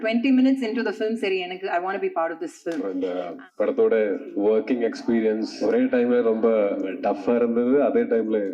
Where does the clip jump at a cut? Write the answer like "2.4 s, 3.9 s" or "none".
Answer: 2.8 s, 4.3 s, 5.5 s, 6.9 s